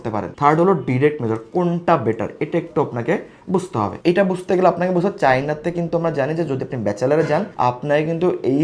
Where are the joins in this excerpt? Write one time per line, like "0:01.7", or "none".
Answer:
none